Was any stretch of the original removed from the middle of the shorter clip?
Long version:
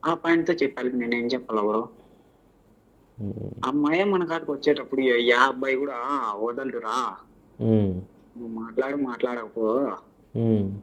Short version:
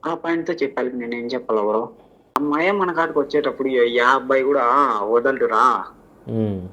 yes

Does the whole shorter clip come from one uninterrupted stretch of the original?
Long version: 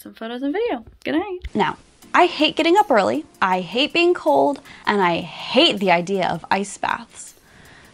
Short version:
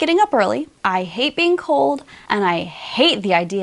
yes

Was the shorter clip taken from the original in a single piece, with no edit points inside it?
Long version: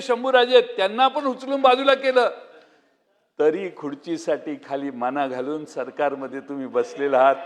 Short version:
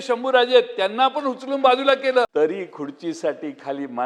no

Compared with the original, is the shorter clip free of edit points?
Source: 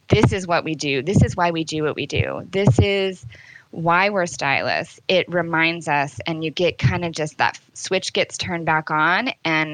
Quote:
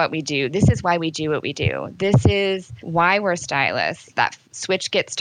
no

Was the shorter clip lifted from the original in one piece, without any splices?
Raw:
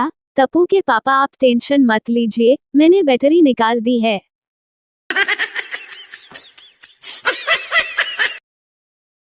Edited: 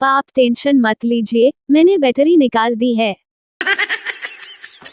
no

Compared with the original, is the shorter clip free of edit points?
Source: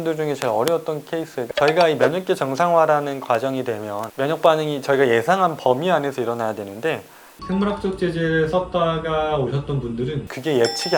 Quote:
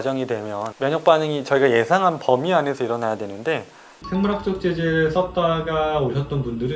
yes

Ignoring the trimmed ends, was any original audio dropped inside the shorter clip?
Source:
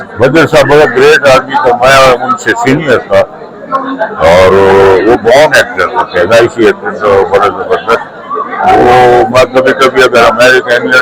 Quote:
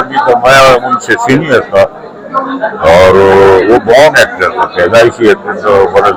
no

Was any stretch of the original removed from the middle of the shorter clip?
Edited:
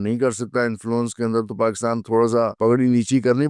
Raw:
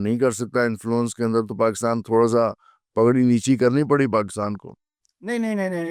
yes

